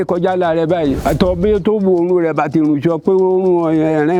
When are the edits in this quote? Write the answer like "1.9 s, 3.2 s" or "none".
1.0 s